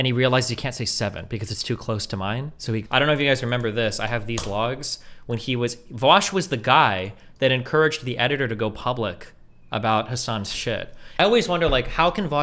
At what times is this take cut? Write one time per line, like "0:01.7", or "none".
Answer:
0:02.8
0:11.2